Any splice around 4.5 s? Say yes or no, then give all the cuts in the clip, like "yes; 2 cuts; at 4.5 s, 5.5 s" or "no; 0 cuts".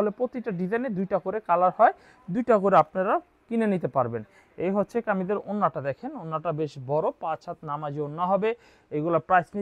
no; 0 cuts